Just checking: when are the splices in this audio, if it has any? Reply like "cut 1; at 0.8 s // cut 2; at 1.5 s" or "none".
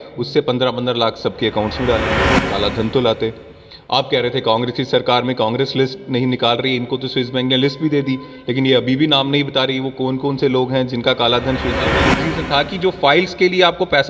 cut 1; at 2.2 s // cut 2; at 12.0 s